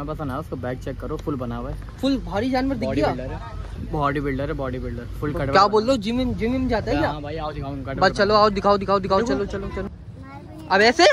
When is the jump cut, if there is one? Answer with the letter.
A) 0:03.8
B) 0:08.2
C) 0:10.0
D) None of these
C